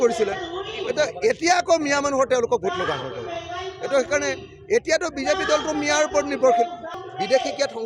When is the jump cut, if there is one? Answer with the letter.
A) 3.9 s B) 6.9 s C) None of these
B